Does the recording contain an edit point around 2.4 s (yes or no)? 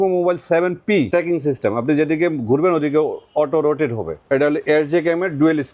no